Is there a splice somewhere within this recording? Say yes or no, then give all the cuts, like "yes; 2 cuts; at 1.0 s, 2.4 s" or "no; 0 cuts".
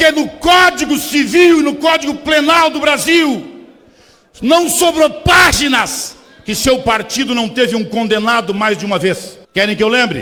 no; 0 cuts